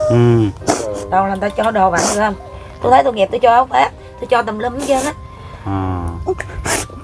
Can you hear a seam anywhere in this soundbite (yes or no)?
no